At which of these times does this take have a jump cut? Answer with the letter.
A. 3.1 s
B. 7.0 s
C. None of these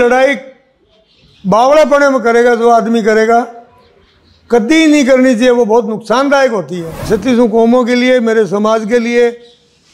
B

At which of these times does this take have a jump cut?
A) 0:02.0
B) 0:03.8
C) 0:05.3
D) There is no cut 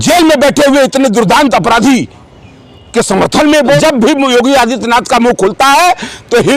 B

